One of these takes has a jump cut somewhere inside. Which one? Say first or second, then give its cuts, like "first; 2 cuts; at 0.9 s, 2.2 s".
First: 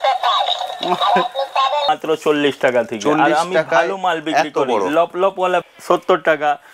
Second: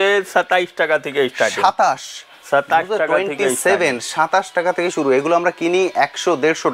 first; 2 cuts; at 1.9 s, 5.6 s